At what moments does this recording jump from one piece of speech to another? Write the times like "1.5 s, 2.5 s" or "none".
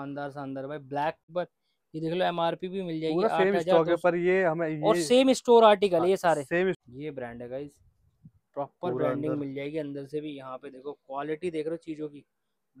1.2 s, 6.8 s